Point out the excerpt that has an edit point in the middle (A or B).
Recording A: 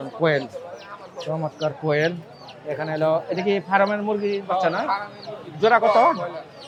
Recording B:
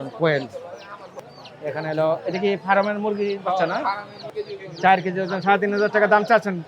B